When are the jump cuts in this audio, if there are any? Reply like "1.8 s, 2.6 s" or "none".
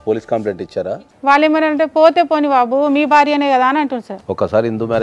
0.9 s, 4.1 s